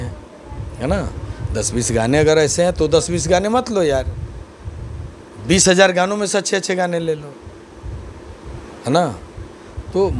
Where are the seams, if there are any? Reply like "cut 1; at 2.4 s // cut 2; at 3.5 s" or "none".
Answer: none